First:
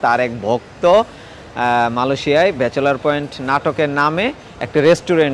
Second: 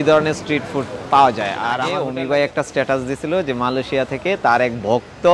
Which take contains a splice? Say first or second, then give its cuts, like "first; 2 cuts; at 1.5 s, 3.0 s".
second; 1 cut; at 2.0 s